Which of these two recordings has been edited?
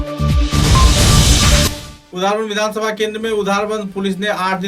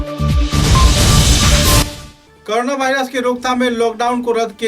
first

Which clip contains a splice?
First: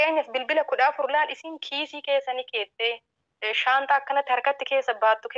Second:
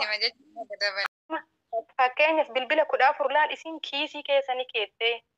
second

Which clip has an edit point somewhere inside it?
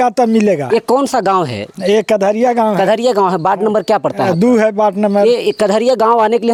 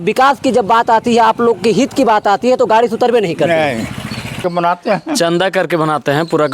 second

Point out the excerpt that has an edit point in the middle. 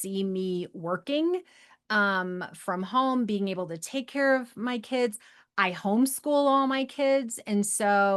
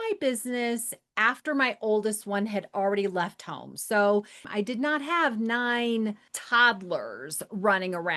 second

